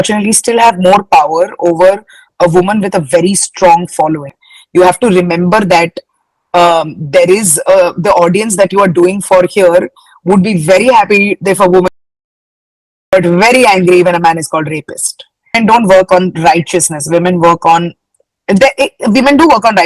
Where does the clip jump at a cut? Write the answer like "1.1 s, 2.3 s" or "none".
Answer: 4.3 s, 15.5 s